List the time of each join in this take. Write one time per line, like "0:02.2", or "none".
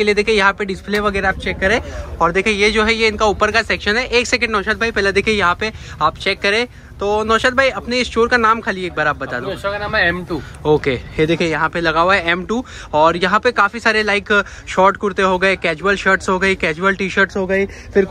none